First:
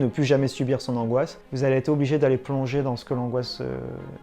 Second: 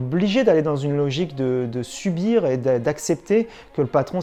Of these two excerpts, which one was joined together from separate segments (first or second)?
first